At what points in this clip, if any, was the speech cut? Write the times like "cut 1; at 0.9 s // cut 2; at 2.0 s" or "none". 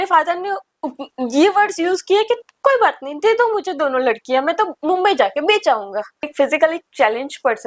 cut 1; at 6.3 s